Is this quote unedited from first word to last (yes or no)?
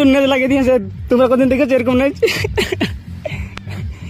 no